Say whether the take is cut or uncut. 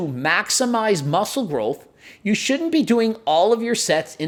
uncut